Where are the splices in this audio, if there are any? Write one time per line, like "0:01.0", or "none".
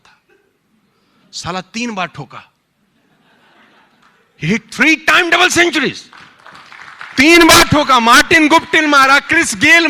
none